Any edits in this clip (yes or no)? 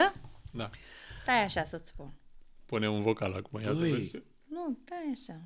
no